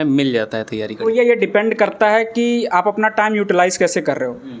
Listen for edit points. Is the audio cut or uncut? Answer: uncut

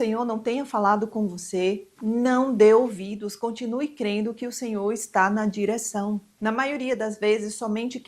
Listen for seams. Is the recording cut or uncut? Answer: cut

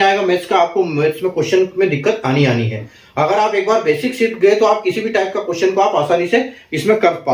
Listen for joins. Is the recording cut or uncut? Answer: uncut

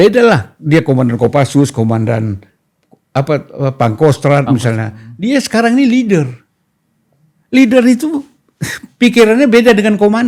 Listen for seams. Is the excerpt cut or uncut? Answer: uncut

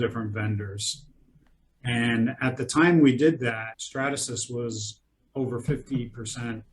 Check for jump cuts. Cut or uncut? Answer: cut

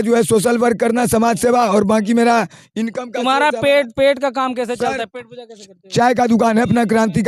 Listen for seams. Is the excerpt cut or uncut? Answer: uncut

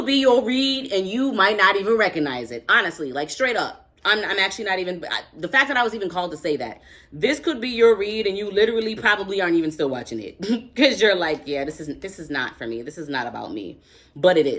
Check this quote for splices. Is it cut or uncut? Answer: uncut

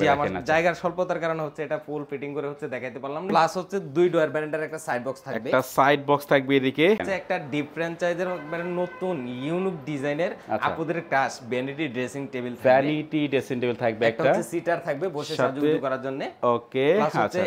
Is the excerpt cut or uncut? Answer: cut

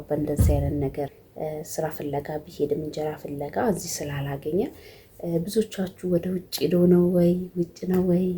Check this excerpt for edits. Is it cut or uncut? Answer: cut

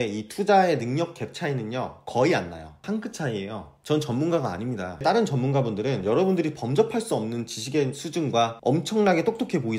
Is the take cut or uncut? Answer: cut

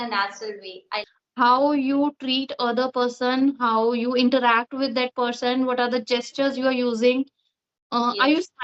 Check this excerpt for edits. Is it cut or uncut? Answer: cut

